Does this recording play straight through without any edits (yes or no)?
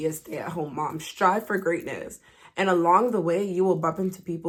yes